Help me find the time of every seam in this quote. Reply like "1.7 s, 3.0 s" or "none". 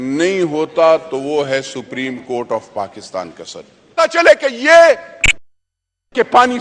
4.0 s